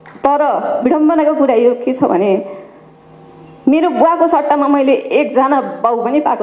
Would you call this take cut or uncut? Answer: uncut